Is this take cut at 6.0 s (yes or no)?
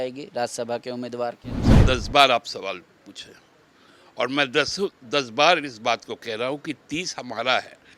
no